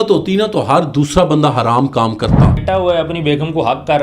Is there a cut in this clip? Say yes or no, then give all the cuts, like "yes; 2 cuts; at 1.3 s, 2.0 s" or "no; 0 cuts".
yes; 1 cut; at 2.6 s